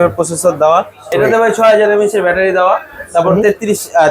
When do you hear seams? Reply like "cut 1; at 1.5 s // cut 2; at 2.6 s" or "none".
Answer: cut 1; at 1.1 s